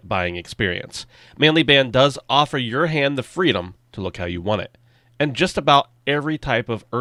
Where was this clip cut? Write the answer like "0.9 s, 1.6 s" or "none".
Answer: none

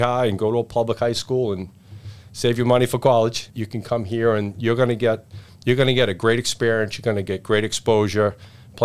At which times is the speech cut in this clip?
none

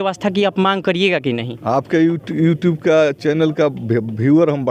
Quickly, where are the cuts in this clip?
none

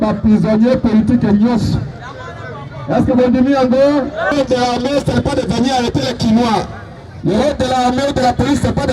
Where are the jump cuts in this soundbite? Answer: 4.3 s

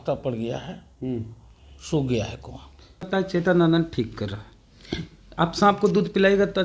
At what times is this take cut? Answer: 3.0 s

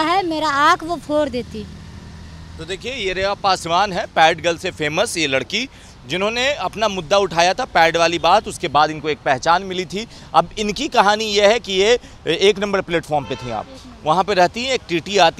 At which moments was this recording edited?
none

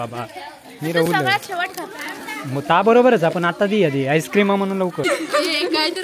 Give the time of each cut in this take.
5.0 s

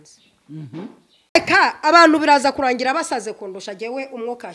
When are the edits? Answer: 1.4 s

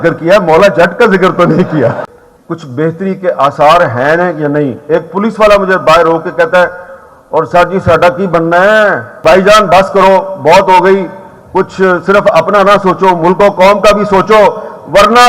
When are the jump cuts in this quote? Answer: 2.0 s, 9.1 s

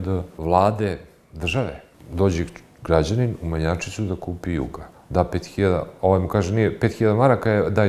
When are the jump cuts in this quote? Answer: 2.0 s

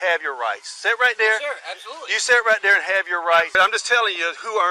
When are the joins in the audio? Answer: 3.5 s

